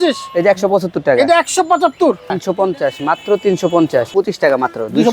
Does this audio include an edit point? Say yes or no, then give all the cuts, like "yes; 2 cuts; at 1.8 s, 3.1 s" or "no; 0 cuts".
yes; 2 cuts; at 2.4 s, 4.1 s